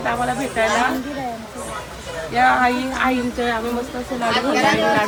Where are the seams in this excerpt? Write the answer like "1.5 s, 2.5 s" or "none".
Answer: none